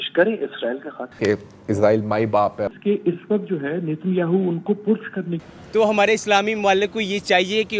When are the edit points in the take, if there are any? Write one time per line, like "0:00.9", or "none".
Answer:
0:01.1
0:05.5

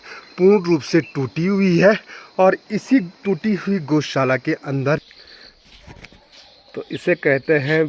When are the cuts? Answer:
0:05.2

